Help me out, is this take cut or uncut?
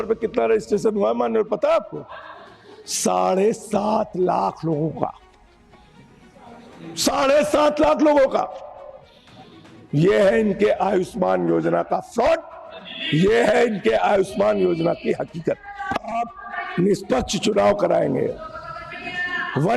cut